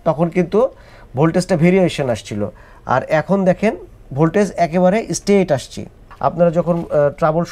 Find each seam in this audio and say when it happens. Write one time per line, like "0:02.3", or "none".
0:06.0

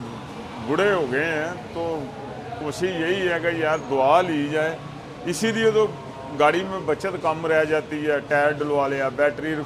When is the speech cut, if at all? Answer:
none

